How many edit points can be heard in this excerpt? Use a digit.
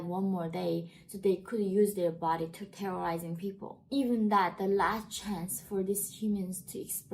1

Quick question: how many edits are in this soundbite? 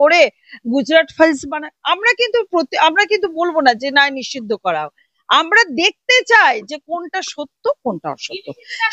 0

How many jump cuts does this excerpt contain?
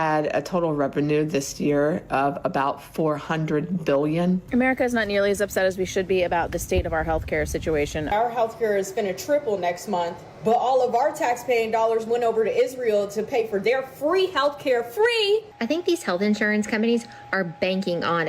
4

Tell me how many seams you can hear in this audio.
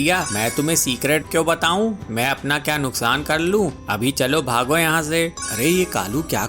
1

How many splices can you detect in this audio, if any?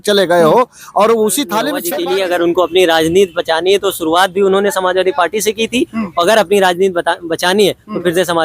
1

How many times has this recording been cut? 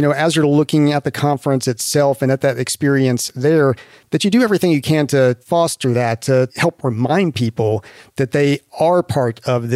2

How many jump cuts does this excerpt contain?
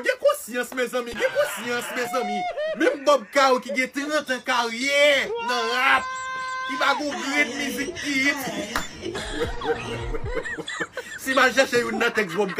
0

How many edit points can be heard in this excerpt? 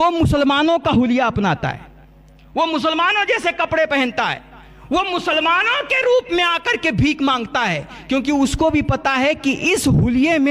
0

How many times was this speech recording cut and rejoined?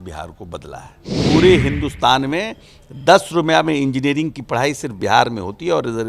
1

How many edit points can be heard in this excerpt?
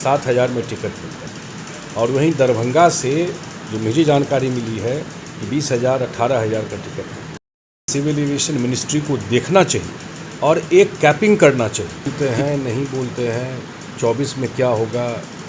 2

